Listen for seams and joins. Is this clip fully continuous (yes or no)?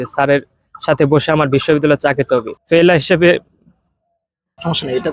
no